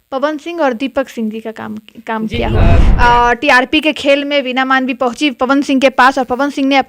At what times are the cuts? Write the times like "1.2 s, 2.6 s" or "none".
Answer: 2.8 s